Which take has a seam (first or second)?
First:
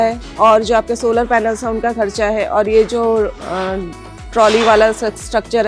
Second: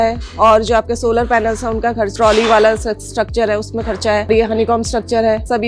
second